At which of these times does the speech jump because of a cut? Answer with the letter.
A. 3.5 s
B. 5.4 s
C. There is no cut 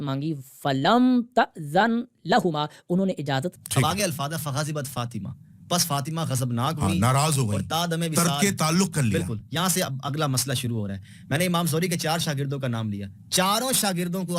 A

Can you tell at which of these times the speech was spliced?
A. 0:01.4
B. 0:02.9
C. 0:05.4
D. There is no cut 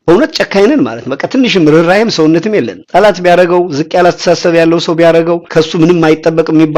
C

